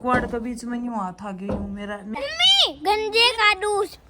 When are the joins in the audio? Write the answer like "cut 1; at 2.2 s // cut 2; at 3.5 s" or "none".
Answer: cut 1; at 2.1 s